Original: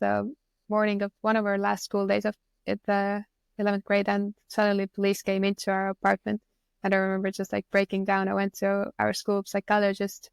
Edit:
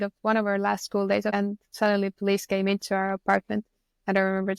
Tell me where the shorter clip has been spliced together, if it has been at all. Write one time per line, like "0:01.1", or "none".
0:01.3